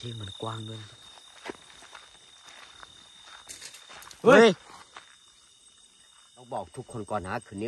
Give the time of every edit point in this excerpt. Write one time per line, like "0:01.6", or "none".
0:00.9
0:06.5